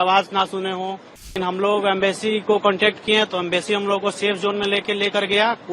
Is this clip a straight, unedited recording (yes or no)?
no